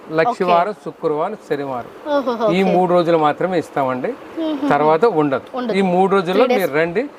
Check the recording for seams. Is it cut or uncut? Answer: uncut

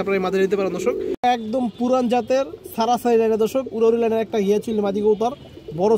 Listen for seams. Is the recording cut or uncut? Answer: cut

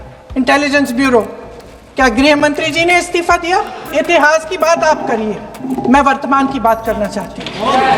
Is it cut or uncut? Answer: cut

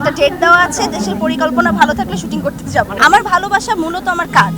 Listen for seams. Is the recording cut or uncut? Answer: cut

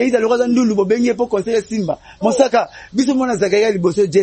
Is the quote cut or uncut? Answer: uncut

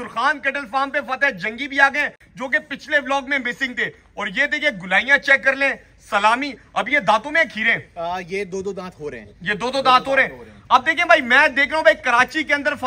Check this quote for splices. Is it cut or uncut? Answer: uncut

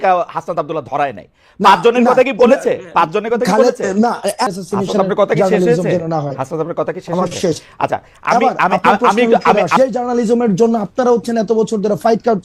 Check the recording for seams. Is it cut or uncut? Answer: cut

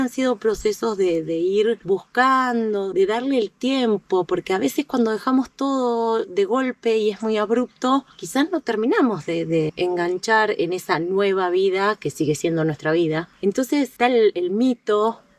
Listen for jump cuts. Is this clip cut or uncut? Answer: uncut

